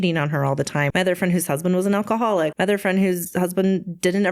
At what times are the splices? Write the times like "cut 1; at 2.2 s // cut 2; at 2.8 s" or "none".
cut 1; at 0.9 s // cut 2; at 2.5 s